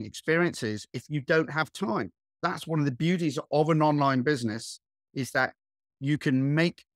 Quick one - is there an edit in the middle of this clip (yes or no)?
yes